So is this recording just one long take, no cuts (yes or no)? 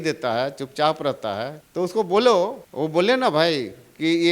no